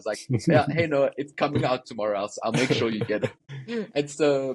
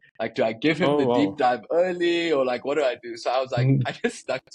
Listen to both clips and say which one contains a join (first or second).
first